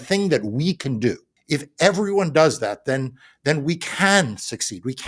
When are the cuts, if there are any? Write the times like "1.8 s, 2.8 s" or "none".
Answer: 1.3 s